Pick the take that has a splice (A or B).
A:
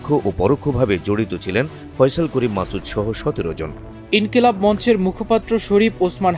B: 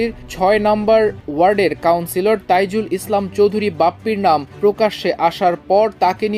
A